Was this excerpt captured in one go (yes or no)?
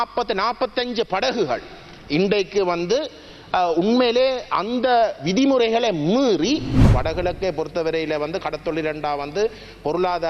no